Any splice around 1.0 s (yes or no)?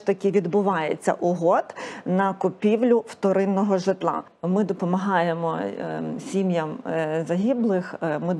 no